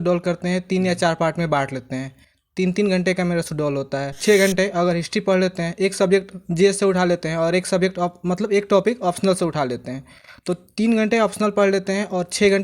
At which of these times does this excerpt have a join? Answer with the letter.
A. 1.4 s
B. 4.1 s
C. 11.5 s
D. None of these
B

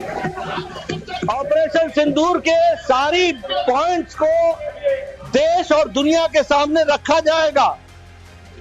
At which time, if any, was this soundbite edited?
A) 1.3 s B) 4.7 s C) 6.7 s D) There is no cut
A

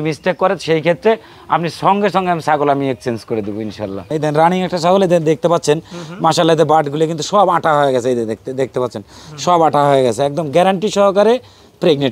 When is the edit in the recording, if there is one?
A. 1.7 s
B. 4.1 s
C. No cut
B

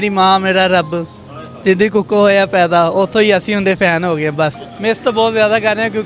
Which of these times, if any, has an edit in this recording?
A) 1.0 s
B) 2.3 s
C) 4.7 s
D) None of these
C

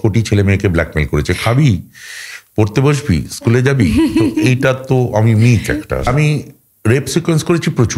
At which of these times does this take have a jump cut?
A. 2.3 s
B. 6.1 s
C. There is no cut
B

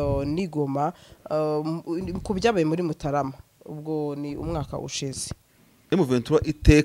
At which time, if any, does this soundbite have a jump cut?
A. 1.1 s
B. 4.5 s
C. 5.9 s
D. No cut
C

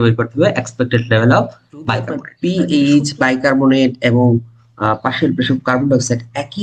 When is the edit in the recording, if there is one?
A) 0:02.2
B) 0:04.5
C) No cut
A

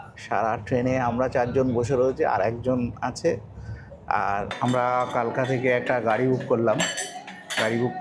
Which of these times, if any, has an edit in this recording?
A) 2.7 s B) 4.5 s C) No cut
B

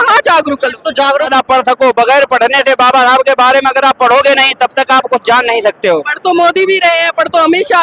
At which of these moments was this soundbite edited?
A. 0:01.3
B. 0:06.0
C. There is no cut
A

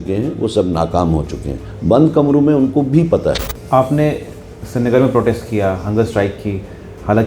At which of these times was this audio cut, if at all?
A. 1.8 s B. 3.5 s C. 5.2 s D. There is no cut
B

